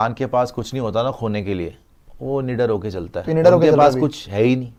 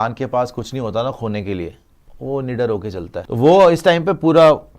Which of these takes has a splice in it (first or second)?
second